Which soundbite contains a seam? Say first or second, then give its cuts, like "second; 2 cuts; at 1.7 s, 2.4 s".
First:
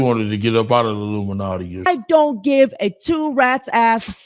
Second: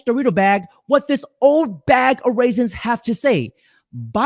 first; 1 cut; at 1.9 s